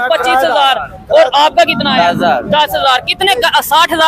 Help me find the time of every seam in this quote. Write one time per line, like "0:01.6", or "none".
none